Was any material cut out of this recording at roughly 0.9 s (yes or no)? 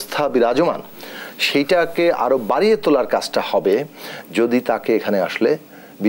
no